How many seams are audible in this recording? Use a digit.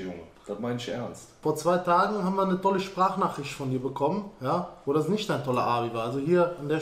1